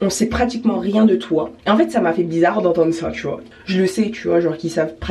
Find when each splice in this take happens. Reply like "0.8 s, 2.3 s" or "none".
1.5 s, 3.5 s

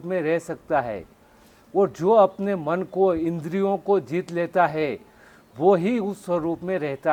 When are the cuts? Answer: none

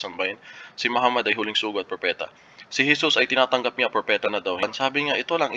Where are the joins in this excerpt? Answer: 4.6 s

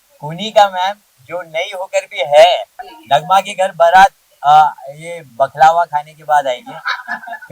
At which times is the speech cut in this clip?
2.9 s

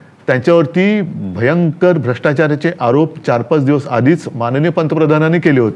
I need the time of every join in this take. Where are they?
none

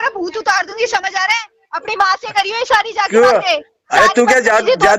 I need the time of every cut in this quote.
none

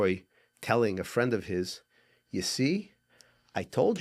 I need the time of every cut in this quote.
none

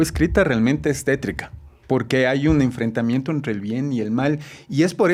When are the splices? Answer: none

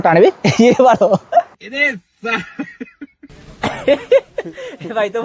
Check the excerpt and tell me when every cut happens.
3.4 s

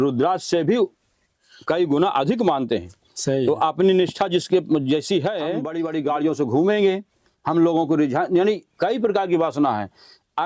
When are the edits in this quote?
5.8 s

